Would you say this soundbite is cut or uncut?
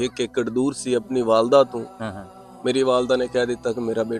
uncut